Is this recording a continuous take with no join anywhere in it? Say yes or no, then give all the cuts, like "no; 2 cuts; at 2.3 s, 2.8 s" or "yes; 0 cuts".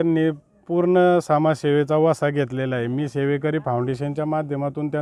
yes; 0 cuts